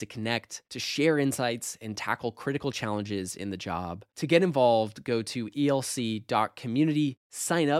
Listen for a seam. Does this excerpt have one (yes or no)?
no